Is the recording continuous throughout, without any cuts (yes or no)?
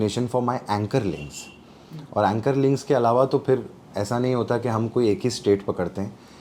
yes